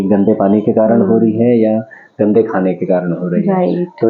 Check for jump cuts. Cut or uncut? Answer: uncut